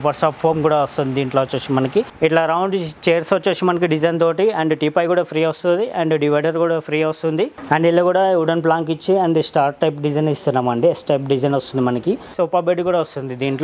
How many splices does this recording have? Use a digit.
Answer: 3